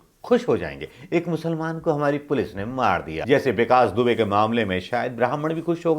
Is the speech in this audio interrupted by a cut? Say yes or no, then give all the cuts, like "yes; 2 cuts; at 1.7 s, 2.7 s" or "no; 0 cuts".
yes; 1 cut; at 3.1 s